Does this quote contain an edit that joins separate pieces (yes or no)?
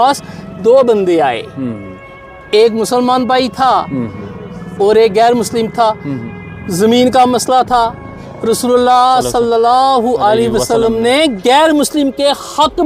no